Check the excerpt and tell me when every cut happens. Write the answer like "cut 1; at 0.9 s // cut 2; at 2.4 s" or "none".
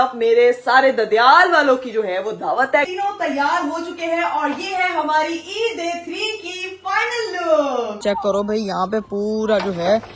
cut 1; at 2.9 s // cut 2; at 8.0 s